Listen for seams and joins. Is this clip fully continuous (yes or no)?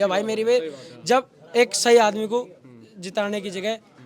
yes